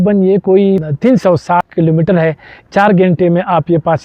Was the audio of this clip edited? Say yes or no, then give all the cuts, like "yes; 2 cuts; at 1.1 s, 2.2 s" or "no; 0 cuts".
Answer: yes; 2 cuts; at 0.9 s, 1.7 s